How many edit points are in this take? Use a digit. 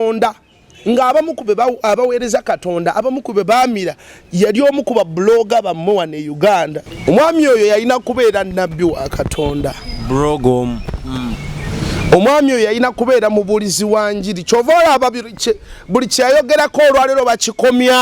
1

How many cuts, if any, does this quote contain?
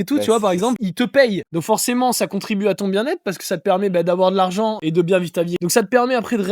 4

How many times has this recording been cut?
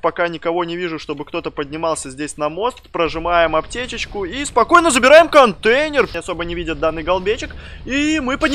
1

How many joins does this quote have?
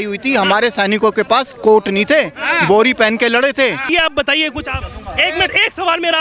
1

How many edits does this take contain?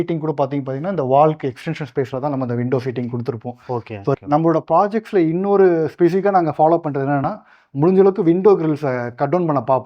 1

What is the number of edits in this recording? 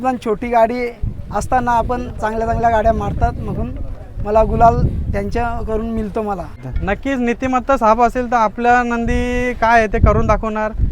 1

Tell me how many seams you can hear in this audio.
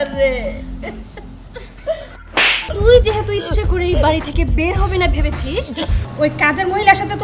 2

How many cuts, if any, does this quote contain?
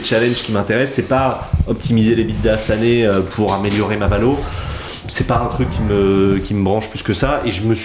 0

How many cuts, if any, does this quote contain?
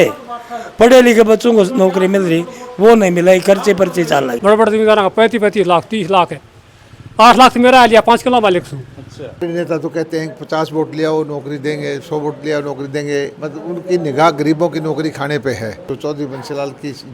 3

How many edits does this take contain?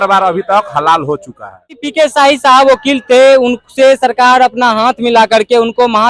1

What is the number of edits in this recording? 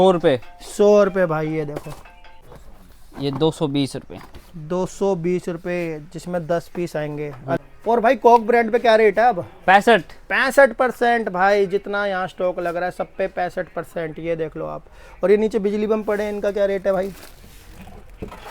2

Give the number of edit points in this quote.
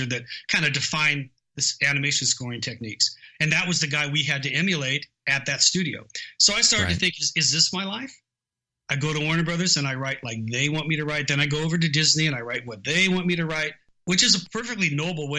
1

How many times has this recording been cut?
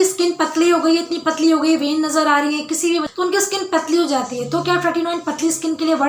1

